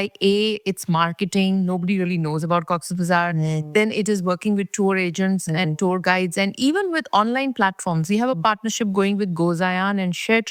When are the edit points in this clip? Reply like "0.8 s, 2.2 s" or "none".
none

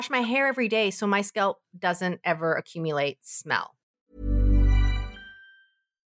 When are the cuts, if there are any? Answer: 4.1 s

